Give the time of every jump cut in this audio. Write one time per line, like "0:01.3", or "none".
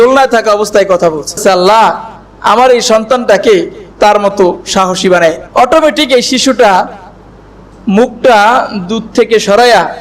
0:01.4
0:05.4